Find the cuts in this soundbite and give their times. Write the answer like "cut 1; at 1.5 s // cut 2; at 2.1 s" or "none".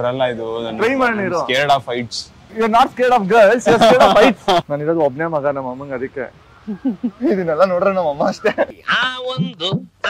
cut 1; at 4.6 s // cut 2; at 8.8 s